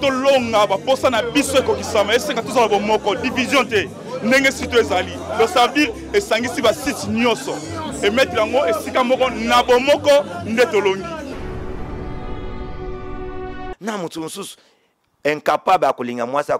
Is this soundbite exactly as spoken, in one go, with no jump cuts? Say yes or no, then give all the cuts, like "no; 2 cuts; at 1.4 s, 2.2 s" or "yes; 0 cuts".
no; 1 cut; at 13.7 s